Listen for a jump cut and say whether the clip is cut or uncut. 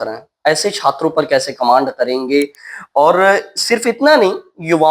uncut